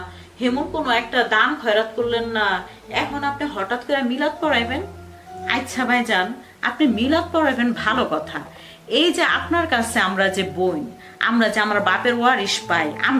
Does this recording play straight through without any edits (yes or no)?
yes